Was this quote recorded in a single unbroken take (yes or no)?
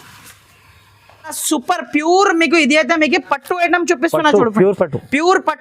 no